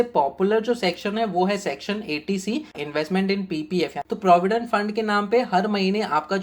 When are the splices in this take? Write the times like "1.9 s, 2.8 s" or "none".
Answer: 2.8 s, 4.0 s